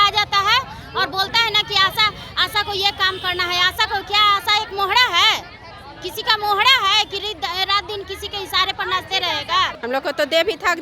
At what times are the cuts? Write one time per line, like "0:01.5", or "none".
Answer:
0:09.8